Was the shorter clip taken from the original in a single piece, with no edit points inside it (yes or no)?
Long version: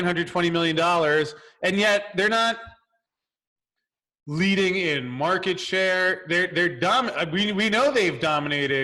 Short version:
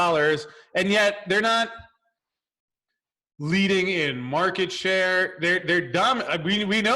yes